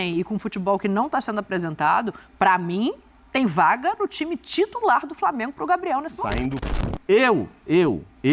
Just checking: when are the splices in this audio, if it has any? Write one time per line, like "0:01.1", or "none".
0:06.6